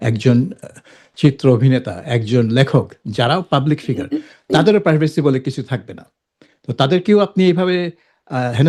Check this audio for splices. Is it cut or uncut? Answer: uncut